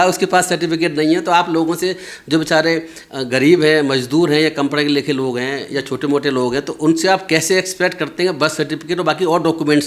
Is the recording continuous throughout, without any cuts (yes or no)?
yes